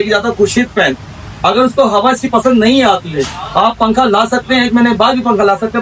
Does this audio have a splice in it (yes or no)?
no